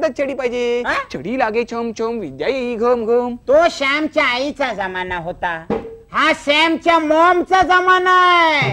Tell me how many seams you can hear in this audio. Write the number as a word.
zero